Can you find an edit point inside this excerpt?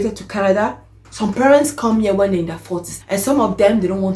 no; 0 cuts

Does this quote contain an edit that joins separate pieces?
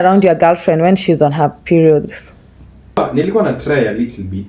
yes; 1 cut; at 3.0 s

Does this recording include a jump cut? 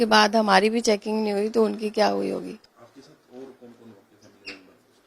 no; 0 cuts

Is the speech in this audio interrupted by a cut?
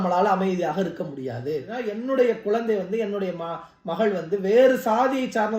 yes; 1 cut; at 1.8 s

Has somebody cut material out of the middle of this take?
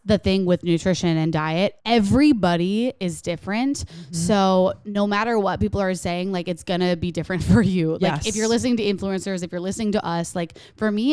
yes; 1 cut; at 1.8 s

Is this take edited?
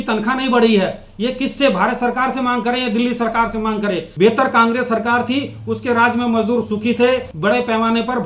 yes; 2 cuts; at 4.1 s, 7.3 s

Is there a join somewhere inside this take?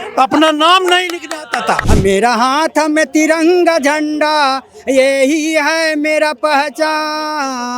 yes; 1 cut; at 1.9 s

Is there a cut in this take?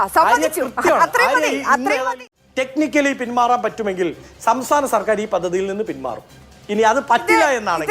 yes; 1 cut; at 2.2 s

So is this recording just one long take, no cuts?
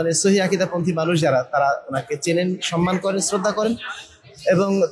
yes; 0 cuts

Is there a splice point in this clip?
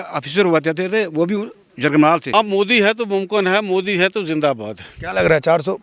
yes; 1 cut; at 2.3 s

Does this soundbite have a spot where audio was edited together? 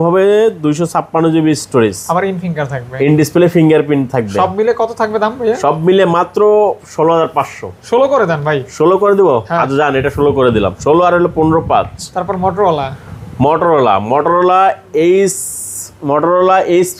no; 0 cuts

